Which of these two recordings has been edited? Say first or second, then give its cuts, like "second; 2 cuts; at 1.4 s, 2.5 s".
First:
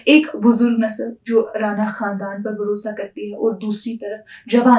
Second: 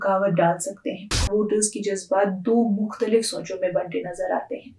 second; 1 cut; at 1.2 s